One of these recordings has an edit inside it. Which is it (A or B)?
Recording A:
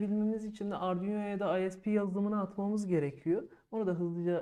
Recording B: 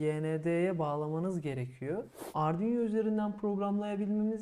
B